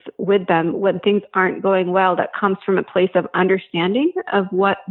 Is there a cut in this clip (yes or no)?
no